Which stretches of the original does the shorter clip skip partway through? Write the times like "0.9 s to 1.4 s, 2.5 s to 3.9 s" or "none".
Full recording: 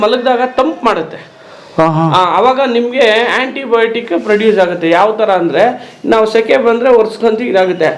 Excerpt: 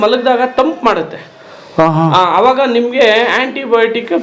none